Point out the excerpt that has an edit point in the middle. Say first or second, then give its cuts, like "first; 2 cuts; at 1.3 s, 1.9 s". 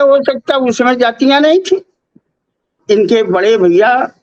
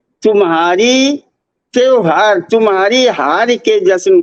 first; 1 cut; at 2.8 s